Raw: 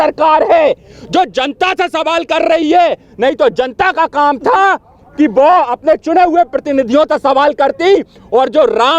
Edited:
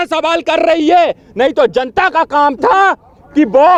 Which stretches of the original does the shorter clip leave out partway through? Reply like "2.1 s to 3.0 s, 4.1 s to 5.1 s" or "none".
none